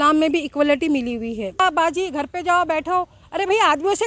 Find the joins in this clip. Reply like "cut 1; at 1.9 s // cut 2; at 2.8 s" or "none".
cut 1; at 1.6 s

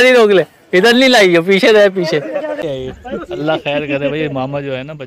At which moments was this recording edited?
cut 1; at 2.7 s

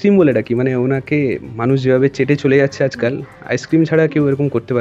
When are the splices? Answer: none

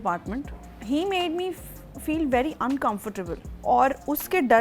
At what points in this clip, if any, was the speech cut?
cut 1; at 3.5 s

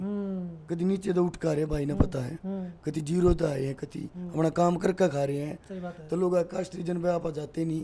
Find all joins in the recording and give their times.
none

